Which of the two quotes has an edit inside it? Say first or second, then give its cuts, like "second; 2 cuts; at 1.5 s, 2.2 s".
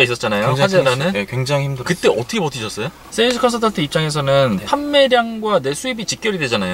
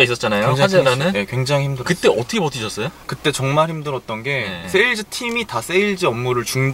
first; 1 cut; at 3.0 s